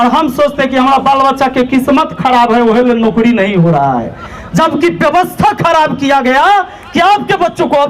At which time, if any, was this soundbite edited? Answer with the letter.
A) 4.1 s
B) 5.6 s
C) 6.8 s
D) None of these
D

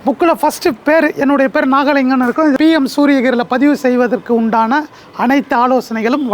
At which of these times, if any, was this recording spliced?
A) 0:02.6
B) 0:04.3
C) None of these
A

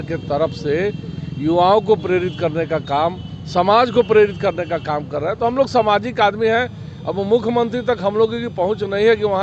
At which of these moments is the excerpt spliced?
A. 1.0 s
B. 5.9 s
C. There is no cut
C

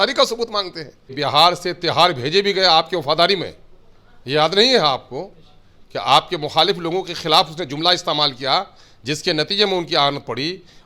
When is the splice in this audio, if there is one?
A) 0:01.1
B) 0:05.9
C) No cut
A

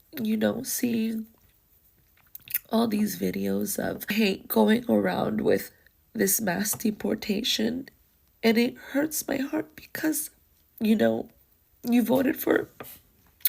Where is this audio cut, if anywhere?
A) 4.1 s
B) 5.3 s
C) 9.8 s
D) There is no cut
A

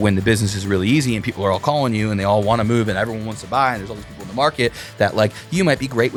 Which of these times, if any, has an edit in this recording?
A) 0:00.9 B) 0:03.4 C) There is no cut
C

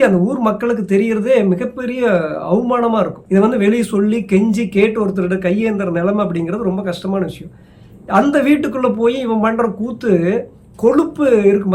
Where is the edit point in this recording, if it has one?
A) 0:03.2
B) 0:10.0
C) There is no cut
A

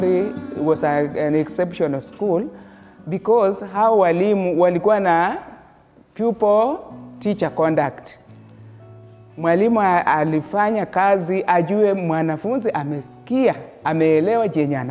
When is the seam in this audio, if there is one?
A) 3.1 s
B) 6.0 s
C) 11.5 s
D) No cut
D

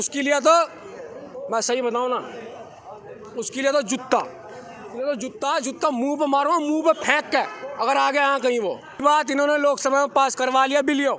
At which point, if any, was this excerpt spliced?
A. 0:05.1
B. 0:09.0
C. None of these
B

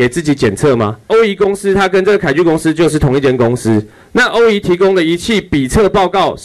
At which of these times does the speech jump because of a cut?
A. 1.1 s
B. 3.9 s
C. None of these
A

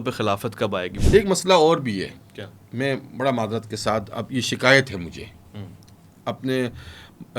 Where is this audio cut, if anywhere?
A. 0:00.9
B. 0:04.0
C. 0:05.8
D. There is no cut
A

